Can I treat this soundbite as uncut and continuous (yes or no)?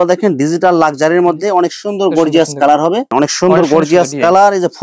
no